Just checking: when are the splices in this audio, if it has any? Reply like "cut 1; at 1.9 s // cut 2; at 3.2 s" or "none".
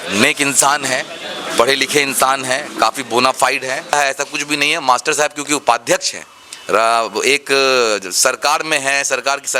cut 1; at 3.9 s